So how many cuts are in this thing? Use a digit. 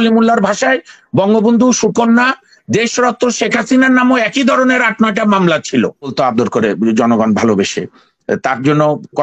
1